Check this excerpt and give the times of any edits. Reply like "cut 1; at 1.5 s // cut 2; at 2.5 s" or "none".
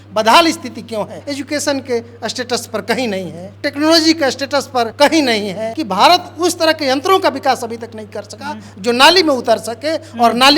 cut 1; at 1.3 s // cut 2; at 3.4 s // cut 3; at 4.9 s // cut 4; at 5.7 s

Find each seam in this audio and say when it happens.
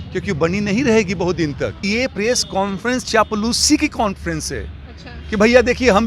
cut 1; at 1.8 s

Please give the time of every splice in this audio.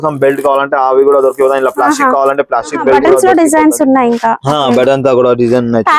cut 1; at 3.0 s

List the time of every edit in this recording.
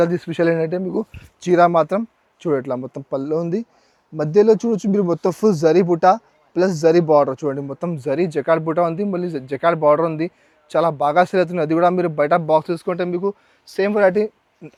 none

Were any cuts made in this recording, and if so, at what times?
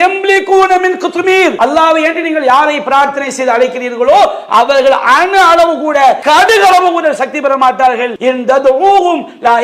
cut 1; at 1.5 s // cut 2; at 6.2 s // cut 3; at 8.1 s

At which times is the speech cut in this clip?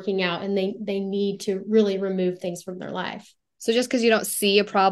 cut 1; at 3.5 s

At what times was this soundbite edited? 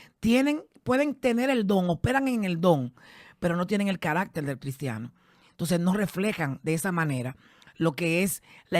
none

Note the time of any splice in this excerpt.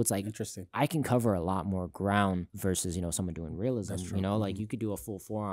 cut 1; at 2.5 s

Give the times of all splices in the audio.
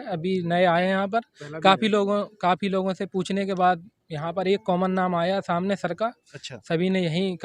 none

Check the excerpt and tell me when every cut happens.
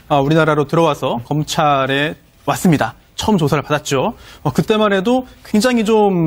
cut 1; at 4.8 s

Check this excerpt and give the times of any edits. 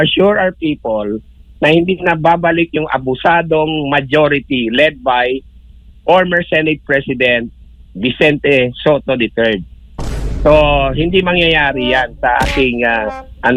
none

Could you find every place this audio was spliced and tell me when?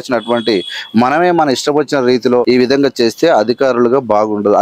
cut 1; at 2.4 s

